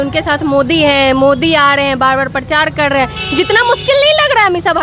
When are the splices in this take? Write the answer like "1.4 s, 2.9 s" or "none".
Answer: none